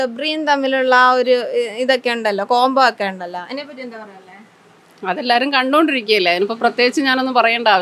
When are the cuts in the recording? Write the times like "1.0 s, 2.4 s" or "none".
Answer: none